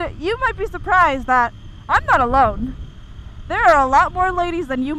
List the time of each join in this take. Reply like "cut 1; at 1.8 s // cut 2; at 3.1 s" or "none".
none